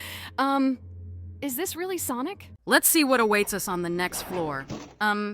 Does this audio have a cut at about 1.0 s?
no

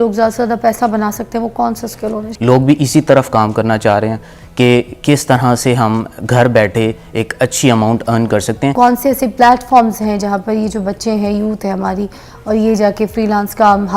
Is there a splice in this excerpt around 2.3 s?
yes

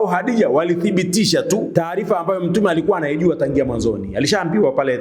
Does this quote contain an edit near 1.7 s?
yes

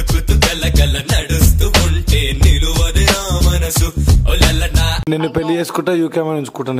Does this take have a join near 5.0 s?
yes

